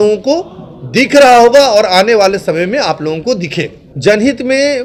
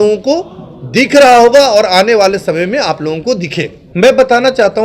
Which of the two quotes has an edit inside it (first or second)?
second